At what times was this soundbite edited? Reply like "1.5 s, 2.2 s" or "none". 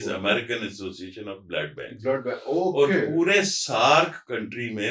none